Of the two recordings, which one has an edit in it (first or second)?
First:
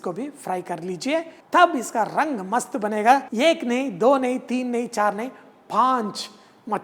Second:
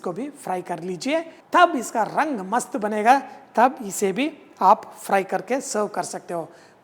first